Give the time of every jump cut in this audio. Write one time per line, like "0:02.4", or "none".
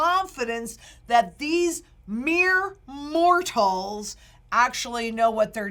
none